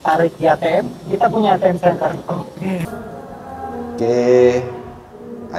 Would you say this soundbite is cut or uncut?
cut